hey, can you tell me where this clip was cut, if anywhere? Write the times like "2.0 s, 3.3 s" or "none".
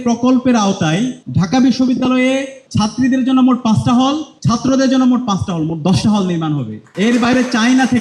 1.2 s, 2.6 s, 4.3 s, 6.8 s